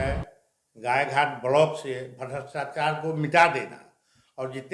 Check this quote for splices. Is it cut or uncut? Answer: uncut